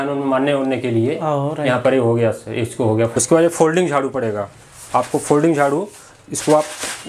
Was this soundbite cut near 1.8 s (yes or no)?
no